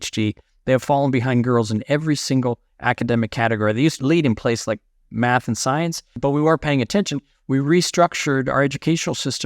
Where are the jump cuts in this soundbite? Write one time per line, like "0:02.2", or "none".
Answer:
0:04.0
0:06.1

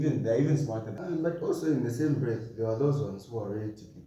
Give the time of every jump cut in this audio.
0:00.9

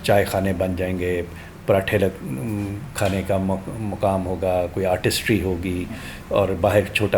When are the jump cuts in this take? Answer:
none

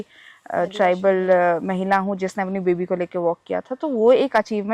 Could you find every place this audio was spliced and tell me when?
none

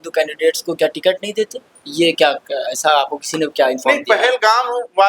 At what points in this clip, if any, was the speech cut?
none

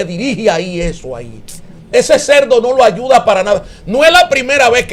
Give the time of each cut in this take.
none

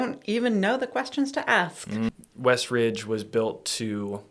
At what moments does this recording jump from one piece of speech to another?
0:02.1

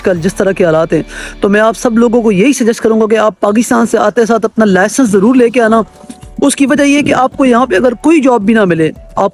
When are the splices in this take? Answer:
none

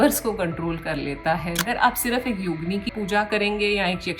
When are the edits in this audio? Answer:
0:01.6
0:02.9

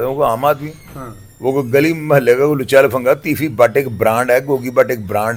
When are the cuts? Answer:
none

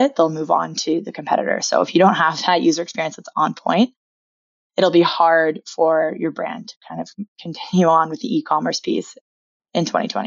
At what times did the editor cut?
0:09.3

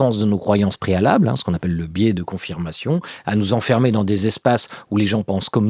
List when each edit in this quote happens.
none

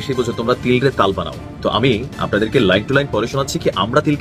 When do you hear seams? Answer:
none

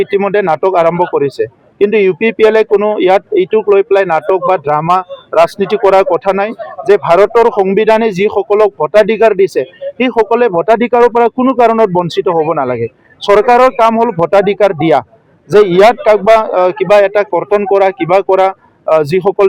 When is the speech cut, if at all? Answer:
none

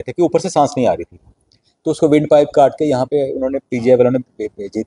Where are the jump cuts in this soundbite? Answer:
none

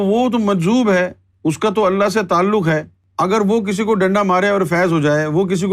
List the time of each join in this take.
0:01.2
0:03.0

